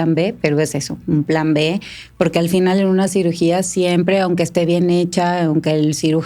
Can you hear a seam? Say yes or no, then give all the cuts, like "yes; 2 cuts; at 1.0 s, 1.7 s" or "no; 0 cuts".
no; 0 cuts